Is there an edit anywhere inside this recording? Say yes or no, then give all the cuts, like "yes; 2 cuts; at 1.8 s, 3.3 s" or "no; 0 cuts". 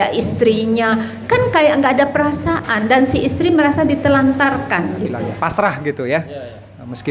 yes; 1 cut; at 5.3 s